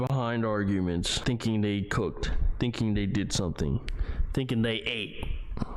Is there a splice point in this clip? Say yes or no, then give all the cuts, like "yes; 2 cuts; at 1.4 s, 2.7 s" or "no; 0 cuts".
yes; 1 cut; at 1.1 s